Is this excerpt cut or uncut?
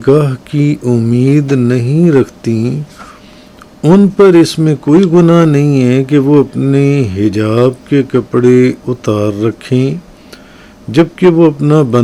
uncut